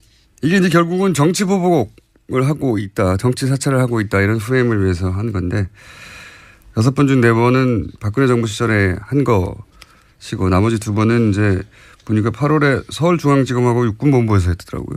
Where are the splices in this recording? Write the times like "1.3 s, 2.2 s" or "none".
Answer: 1.1 s